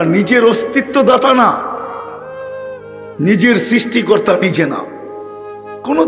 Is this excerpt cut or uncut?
cut